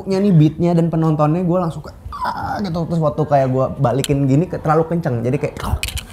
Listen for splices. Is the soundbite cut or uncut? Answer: uncut